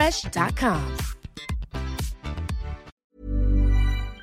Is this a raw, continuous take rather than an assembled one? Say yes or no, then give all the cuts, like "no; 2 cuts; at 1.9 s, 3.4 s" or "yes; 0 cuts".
no; 1 cut; at 3.0 s